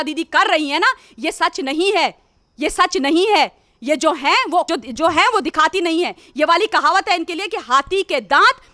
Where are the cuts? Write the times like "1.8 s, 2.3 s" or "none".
none